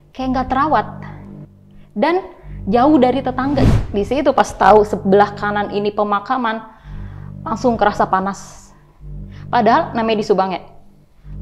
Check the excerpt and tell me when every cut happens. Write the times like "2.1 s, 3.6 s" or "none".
3.7 s